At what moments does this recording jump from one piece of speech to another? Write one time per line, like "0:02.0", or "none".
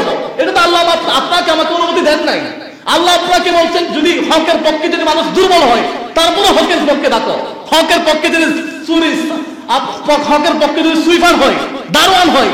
none